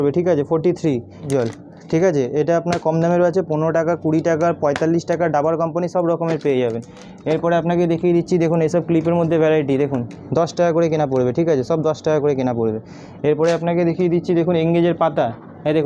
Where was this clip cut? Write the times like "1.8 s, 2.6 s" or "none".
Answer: none